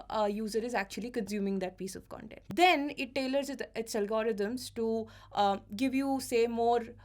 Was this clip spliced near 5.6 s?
no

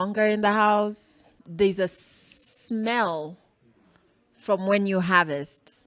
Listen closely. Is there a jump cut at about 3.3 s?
no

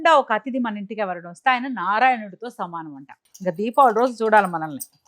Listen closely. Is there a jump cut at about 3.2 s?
yes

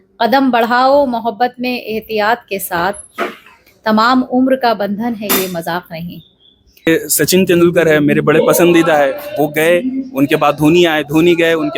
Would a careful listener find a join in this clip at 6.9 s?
yes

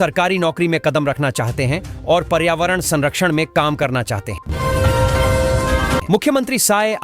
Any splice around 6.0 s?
yes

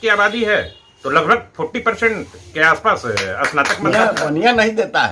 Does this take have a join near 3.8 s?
yes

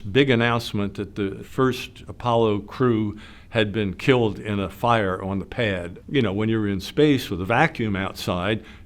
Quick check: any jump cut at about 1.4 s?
yes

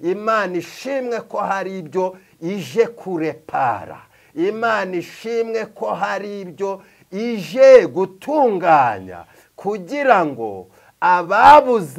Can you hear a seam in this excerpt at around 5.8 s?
no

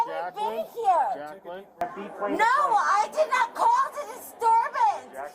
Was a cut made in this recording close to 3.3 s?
no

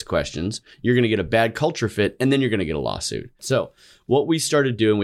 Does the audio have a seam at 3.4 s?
yes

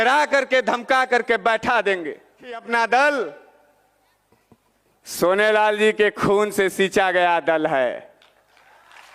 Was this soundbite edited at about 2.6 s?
yes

